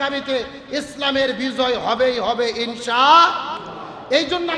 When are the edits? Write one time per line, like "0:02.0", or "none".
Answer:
none